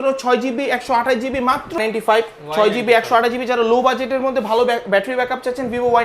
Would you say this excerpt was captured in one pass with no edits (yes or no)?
no